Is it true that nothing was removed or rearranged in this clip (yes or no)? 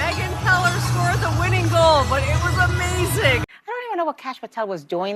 no